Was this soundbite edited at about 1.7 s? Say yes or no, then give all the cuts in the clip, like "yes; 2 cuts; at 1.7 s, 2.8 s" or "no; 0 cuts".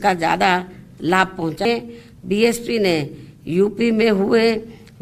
yes; 1 cut; at 1.7 s